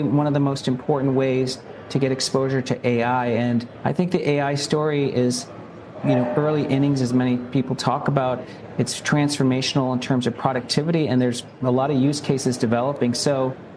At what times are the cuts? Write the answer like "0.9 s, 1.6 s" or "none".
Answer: 3.7 s